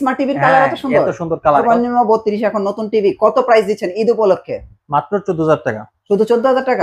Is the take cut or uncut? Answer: cut